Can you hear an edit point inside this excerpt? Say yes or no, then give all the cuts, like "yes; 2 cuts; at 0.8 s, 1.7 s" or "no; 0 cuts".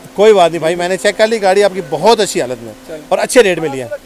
no; 0 cuts